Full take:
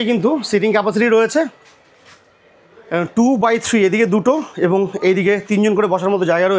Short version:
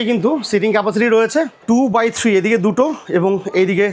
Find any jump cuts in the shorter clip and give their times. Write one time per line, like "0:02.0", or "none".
0:01.6